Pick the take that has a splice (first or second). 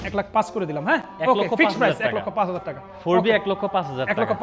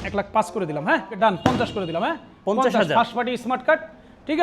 second